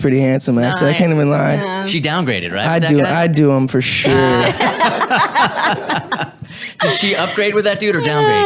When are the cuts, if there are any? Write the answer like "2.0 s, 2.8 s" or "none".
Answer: 1.0 s